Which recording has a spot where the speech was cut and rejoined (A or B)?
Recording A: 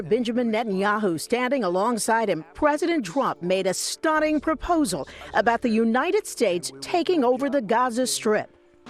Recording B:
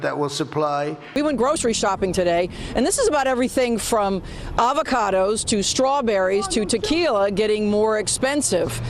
B